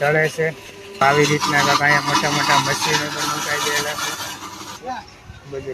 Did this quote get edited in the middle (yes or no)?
yes